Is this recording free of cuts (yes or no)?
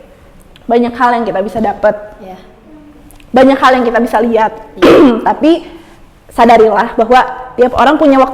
yes